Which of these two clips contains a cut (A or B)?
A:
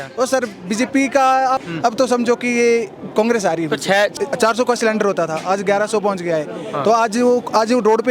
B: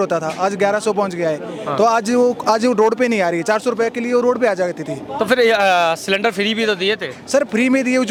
A